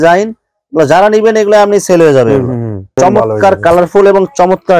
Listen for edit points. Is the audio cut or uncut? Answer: cut